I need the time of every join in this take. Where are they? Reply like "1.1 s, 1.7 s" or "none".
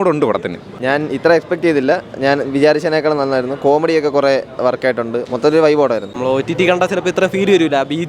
1.0 s, 6.1 s

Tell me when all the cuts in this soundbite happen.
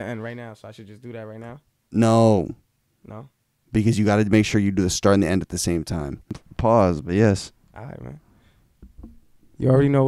6.4 s

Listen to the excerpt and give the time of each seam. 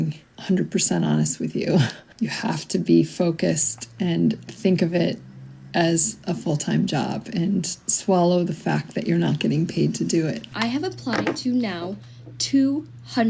10.5 s

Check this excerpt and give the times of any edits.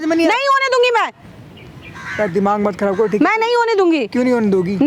none

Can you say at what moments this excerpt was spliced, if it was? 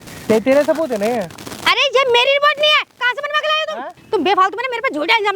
4.0 s

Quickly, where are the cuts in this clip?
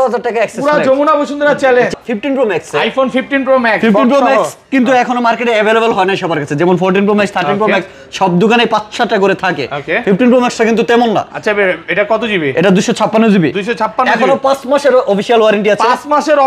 1.9 s

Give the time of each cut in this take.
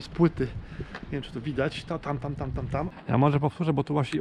2.9 s

